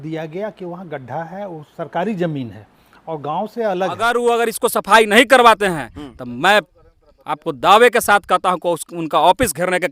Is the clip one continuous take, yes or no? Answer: no